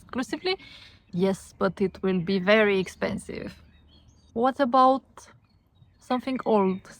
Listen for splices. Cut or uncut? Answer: cut